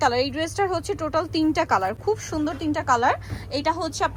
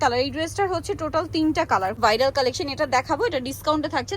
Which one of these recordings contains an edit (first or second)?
second